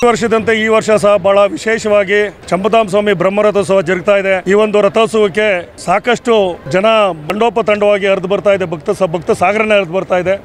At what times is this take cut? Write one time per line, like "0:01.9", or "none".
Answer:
0:02.4
0:04.4
0:05.7
0:06.6
0:07.3